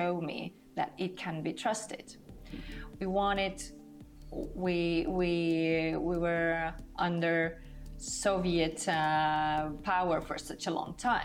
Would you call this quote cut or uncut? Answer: uncut